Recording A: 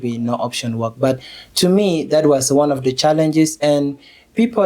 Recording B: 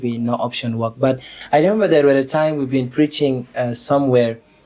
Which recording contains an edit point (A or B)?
B